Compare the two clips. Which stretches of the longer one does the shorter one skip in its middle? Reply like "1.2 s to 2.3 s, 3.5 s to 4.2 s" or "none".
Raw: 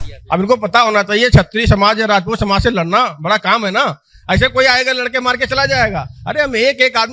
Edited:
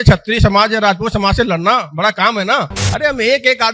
4.1 s to 6.2 s